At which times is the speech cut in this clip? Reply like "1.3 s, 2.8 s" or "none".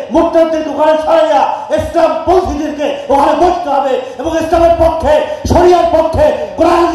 none

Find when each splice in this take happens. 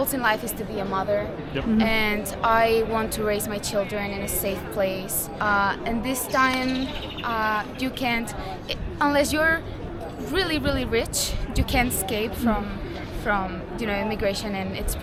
none

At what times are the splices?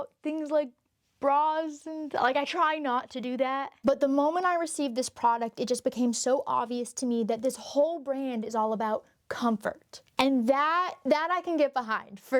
none

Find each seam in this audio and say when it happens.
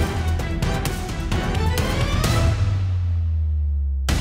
none

